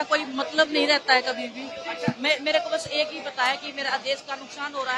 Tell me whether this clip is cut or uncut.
uncut